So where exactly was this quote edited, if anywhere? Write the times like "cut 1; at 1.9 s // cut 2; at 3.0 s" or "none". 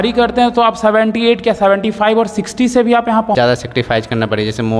cut 1; at 3.3 s